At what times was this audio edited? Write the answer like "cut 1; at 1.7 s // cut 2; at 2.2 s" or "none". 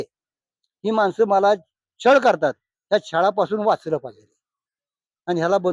none